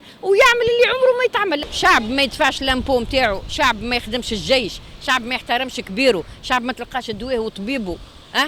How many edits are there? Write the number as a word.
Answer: one